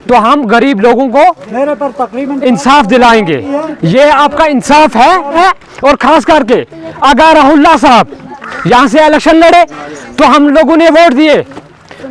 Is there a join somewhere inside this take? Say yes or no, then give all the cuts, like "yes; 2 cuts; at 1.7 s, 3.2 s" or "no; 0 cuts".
yes; 1 cut; at 5.4 s